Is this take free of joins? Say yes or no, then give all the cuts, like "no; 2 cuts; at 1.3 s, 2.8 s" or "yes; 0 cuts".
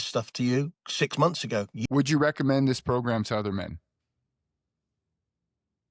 no; 1 cut; at 1.7 s